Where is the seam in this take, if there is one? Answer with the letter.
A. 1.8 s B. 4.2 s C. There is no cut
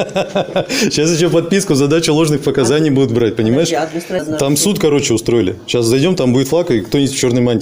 B